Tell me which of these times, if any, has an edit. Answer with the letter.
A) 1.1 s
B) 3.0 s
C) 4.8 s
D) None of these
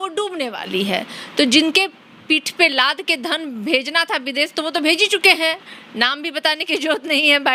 D